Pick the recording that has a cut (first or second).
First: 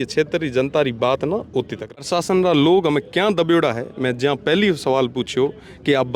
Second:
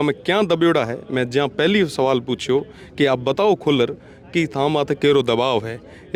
first